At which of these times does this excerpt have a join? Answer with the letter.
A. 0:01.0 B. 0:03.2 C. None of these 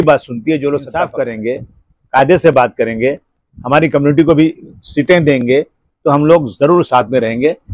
A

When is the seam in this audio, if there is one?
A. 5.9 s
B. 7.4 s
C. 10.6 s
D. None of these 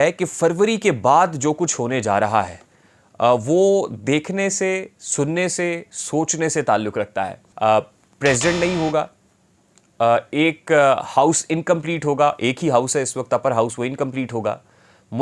B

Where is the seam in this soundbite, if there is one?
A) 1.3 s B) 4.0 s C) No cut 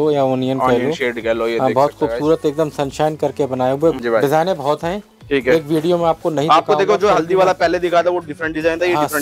B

